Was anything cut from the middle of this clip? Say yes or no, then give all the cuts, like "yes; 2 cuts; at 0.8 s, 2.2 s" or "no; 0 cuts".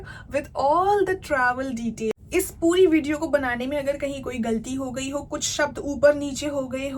yes; 1 cut; at 2.1 s